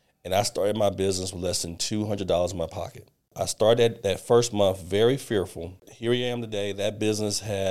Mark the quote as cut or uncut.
cut